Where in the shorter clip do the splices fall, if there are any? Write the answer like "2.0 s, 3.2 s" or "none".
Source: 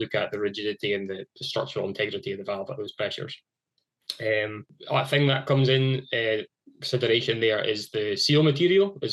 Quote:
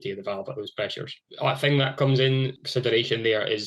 1.2 s, 2.6 s